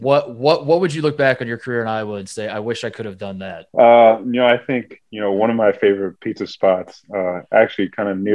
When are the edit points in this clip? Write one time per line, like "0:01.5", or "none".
0:03.6